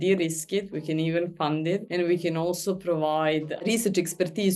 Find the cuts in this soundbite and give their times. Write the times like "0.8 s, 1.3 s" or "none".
1.9 s, 3.5 s